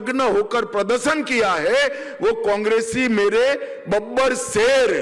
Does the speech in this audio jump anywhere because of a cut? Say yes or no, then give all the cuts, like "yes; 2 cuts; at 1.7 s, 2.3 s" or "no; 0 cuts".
no; 0 cuts